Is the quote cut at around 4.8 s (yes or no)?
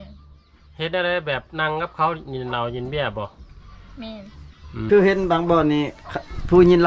yes